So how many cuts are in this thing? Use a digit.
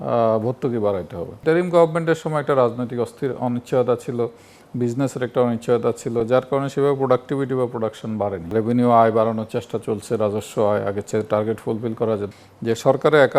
3